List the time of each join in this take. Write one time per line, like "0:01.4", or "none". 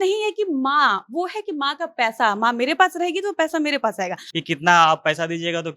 0:04.2